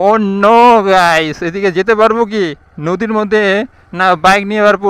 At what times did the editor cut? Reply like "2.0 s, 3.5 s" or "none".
none